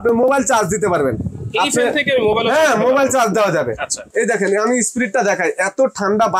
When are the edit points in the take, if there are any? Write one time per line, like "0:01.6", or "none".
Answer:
0:04.0